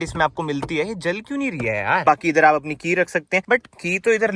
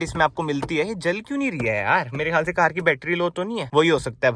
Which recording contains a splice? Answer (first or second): first